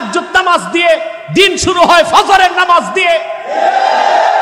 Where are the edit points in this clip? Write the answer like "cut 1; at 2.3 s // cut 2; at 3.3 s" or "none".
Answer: none

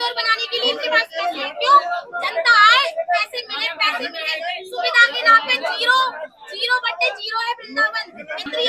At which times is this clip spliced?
none

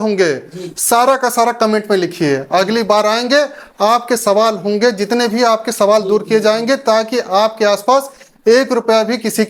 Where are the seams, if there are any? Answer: none

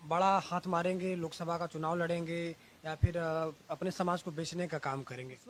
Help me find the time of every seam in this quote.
none

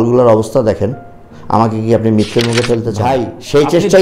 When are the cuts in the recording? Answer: cut 1; at 3.0 s

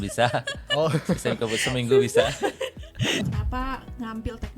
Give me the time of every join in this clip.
cut 1; at 3.2 s

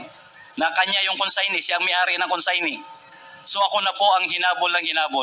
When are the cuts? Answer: none

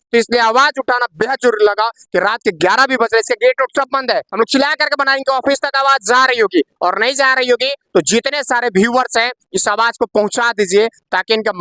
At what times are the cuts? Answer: cut 1; at 4.3 s

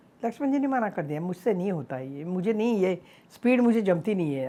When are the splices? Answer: none

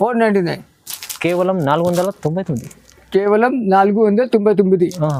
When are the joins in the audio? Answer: none

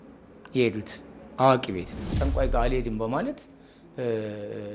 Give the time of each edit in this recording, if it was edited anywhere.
cut 1; at 2.1 s

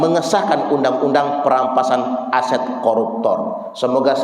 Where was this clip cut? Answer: none

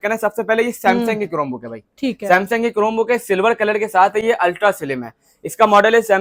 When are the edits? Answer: none

